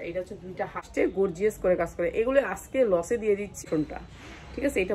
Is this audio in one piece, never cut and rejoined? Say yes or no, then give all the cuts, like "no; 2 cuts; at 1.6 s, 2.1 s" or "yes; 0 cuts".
no; 2 cuts; at 0.9 s, 3.6 s